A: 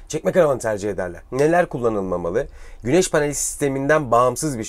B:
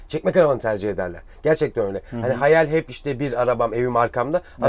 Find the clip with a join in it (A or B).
A